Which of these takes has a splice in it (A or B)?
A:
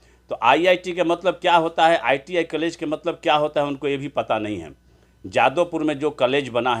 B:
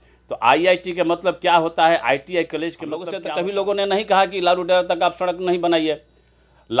B